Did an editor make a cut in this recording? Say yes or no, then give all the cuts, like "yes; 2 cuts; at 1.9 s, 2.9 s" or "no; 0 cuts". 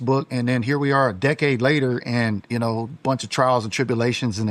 no; 0 cuts